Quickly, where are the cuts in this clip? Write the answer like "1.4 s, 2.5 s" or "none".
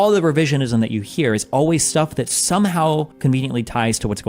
3.1 s